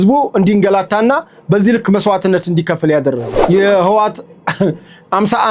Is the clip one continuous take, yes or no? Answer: no